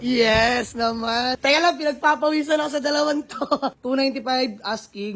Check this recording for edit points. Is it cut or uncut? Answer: cut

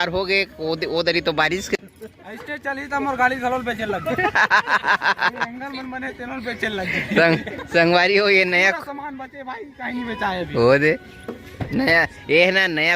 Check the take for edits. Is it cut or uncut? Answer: cut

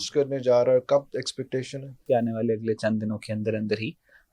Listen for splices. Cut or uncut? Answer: cut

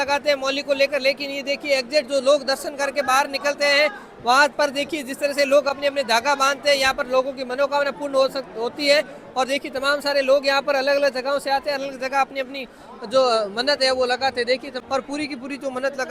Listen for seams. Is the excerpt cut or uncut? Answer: uncut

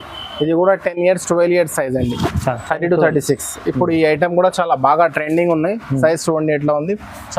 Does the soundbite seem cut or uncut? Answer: uncut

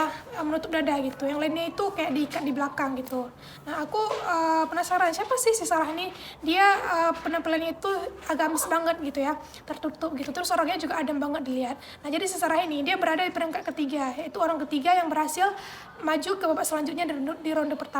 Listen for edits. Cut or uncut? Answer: uncut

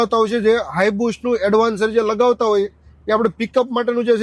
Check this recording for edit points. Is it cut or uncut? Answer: uncut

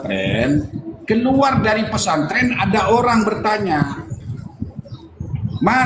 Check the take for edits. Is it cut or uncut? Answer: uncut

